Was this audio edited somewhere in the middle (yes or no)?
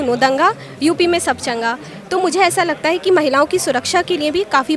no